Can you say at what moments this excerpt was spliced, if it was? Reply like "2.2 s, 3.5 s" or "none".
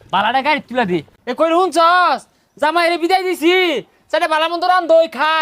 1.1 s